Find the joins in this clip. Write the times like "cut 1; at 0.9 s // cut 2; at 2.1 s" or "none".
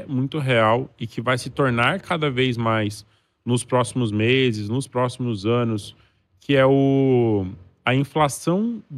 none